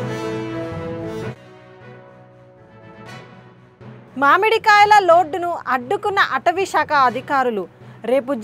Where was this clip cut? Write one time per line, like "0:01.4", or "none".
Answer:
0:01.1